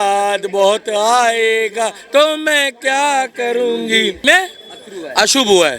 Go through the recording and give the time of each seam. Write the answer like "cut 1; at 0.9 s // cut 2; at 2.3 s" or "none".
cut 1; at 4.2 s